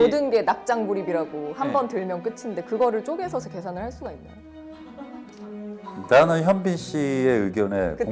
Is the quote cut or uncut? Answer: uncut